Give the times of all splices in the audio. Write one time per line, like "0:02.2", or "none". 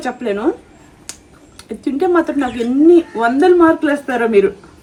none